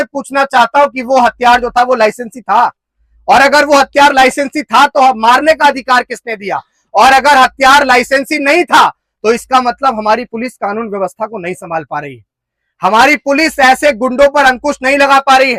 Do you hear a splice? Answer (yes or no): no